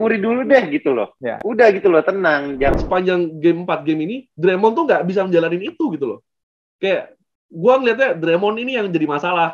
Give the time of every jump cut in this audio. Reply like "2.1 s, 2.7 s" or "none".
2.8 s